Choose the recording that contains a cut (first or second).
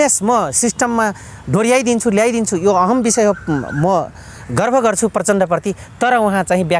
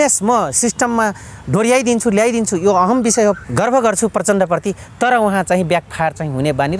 second